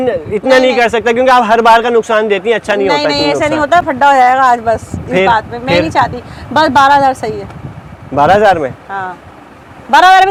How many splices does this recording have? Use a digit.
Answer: 0